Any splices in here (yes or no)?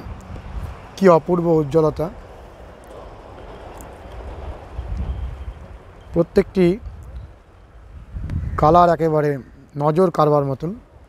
no